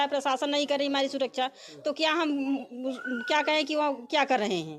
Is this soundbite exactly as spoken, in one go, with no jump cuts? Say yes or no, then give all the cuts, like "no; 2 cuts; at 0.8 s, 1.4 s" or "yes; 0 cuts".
yes; 0 cuts